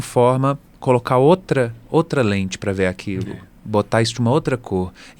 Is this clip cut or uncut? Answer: uncut